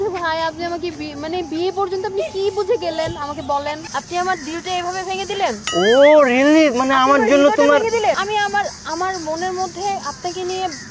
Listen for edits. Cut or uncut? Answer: cut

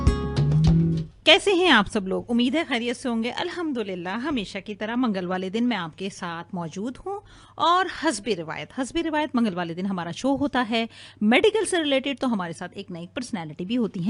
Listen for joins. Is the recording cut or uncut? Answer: cut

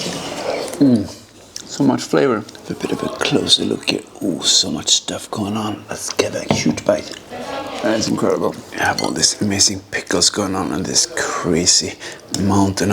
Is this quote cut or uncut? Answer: uncut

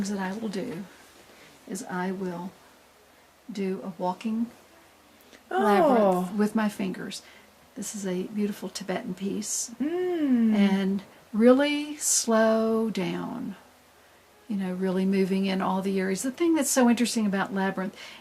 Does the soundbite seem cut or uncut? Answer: cut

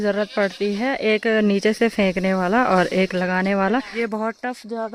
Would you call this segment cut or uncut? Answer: cut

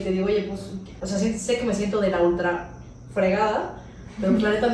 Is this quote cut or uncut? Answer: cut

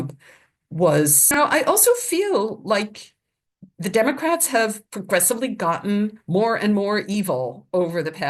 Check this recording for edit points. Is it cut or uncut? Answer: cut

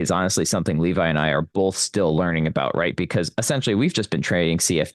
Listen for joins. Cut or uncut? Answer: uncut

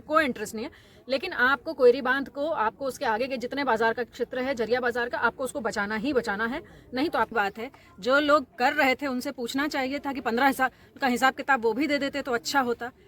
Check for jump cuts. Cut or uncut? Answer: cut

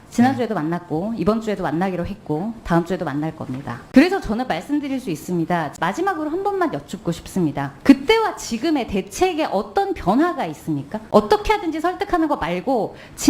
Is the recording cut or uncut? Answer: cut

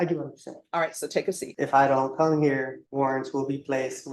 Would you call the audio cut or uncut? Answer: cut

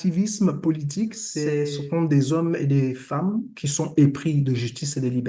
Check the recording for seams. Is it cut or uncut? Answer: cut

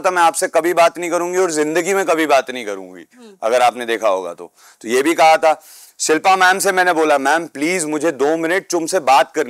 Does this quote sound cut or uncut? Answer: uncut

